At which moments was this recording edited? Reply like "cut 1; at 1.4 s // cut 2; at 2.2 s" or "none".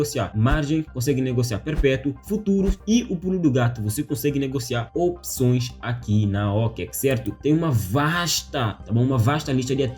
none